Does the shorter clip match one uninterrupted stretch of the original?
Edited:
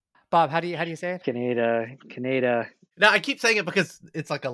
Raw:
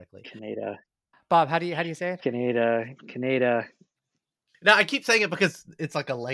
no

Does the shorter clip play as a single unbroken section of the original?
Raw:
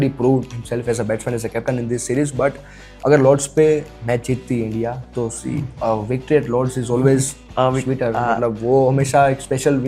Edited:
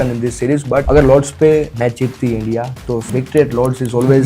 no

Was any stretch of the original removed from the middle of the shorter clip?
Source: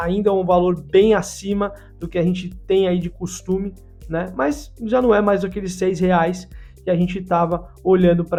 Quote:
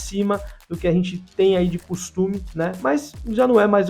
yes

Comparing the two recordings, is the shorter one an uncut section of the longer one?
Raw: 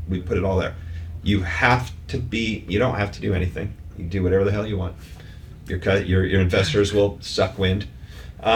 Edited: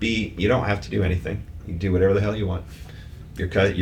yes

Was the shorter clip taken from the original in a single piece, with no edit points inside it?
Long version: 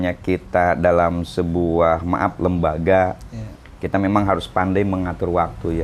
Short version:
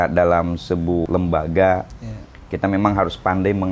no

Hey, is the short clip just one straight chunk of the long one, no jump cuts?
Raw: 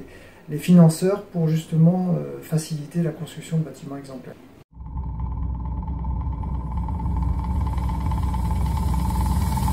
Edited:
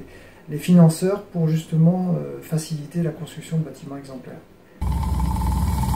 no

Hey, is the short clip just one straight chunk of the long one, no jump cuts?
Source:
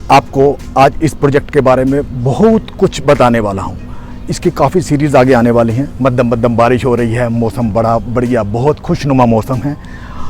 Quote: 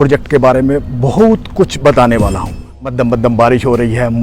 no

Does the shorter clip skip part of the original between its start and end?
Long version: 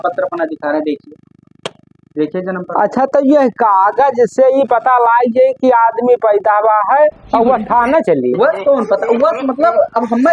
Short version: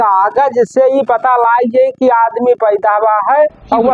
no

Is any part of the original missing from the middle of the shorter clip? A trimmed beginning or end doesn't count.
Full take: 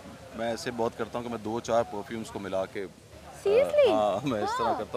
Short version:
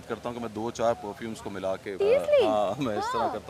yes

